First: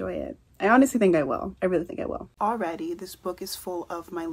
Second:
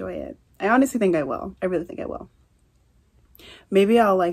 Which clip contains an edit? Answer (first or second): first